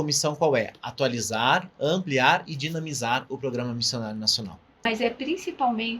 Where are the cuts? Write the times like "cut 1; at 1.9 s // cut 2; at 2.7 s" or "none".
cut 1; at 4.8 s